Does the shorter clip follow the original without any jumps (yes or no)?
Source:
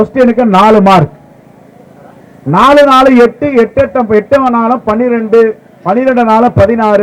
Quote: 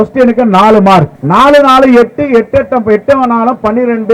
no